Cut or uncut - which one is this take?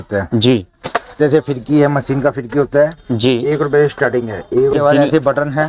cut